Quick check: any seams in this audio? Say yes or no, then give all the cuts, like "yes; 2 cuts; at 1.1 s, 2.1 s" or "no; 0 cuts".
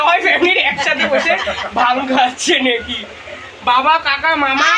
no; 0 cuts